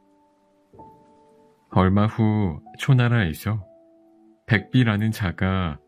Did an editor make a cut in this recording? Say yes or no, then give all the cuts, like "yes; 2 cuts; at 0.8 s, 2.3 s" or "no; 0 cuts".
no; 0 cuts